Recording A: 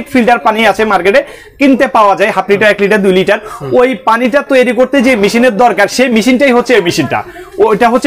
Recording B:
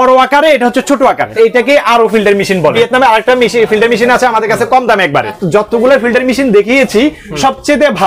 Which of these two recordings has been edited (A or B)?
B